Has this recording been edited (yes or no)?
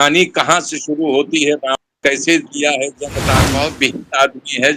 yes